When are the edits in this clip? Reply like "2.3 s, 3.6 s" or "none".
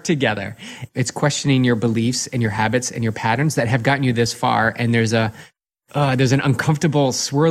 0.9 s, 5.8 s